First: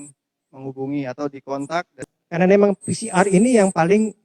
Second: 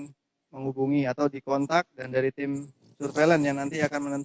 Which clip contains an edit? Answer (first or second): first